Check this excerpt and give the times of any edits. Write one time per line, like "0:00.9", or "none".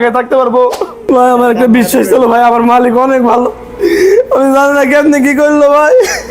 0:01.0